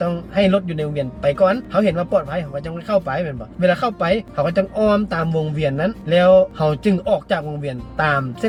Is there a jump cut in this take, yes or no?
no